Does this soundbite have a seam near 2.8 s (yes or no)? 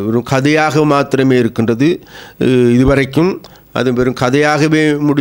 no